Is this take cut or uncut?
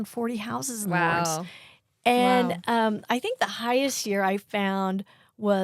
uncut